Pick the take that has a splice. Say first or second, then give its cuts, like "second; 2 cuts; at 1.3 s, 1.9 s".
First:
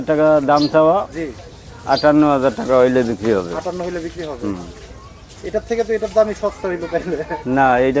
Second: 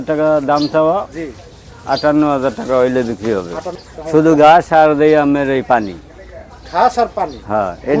second; 1 cut; at 3.9 s